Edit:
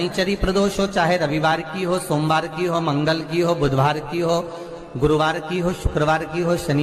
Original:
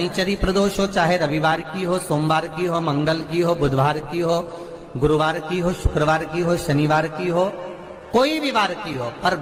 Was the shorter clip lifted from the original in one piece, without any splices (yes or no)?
yes